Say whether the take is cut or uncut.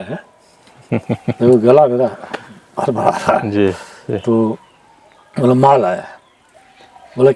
uncut